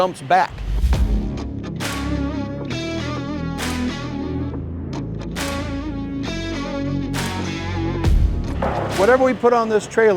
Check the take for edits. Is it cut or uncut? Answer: uncut